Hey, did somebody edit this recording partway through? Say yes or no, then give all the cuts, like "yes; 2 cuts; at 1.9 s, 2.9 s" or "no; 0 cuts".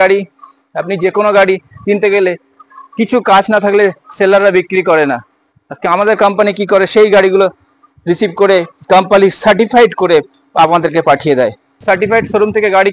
yes; 1 cut; at 11.8 s